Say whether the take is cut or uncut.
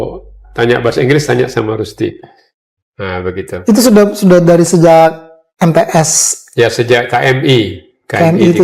uncut